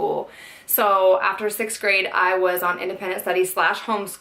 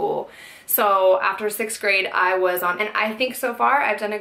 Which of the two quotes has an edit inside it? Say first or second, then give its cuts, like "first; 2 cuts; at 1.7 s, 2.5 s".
first; 1 cut; at 2.8 s